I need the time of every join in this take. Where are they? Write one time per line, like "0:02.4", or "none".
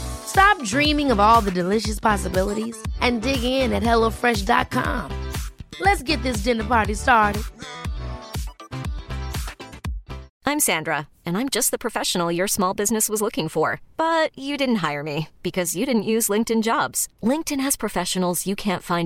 0:10.3